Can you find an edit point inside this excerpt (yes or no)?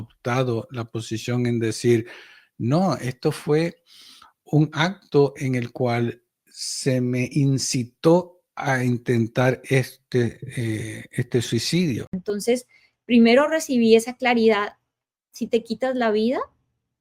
yes